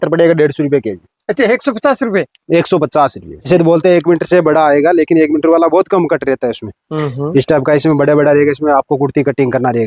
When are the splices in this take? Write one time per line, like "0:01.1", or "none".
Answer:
0:03.4